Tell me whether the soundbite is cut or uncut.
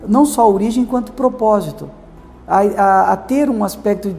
uncut